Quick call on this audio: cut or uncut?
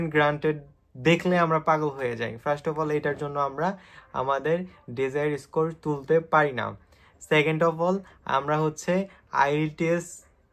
uncut